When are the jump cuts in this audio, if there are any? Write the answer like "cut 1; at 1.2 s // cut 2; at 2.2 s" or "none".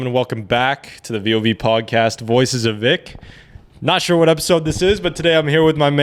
none